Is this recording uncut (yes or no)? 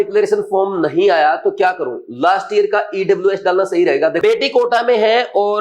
no